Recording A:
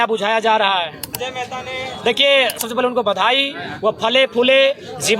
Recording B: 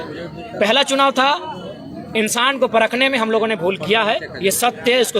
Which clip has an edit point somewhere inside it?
A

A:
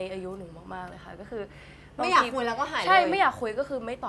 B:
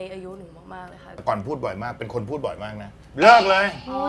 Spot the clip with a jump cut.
B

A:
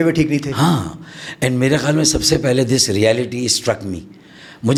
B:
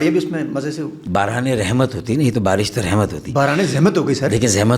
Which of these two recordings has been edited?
B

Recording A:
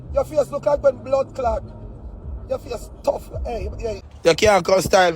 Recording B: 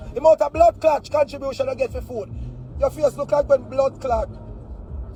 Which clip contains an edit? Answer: A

